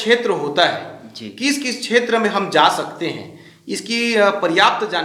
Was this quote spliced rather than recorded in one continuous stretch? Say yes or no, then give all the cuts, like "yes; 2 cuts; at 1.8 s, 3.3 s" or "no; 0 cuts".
no; 0 cuts